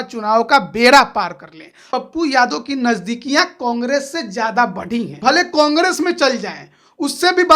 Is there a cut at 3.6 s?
no; 2 cuts; at 1.8 s, 5.1 s

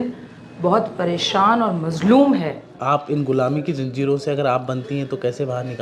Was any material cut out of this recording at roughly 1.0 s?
no; 1 cut; at 2.7 s

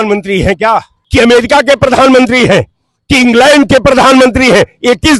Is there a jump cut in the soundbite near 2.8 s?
no; 1 cut; at 1.0 s

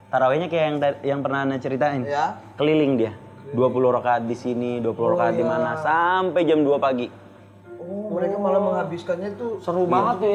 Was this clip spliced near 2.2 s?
no; 0 cuts

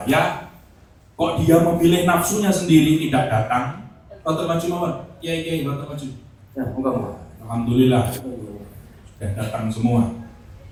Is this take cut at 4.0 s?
no; 0 cuts

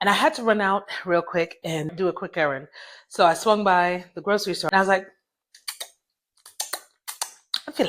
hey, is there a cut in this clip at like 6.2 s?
no; 2 cuts; at 1.9 s, 4.6 s

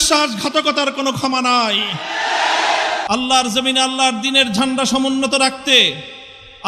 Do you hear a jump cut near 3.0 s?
yes; 1 cut; at 3.0 s

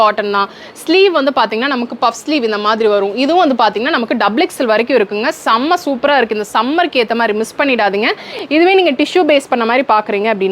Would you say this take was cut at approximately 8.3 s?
yes; 1 cut; at 8.3 s

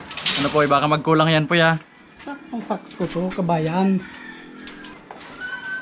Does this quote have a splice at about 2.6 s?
no; 1 cut; at 4.9 s

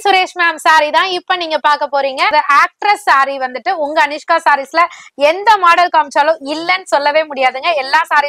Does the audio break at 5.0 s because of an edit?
no; 1 cut; at 2.3 s

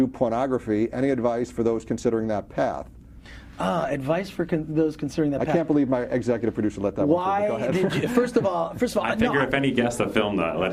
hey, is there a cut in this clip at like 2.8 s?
no; 0 cuts

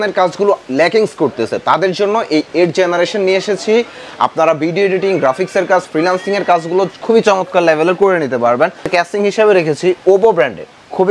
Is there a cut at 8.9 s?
yes; 1 cut; at 8.9 s

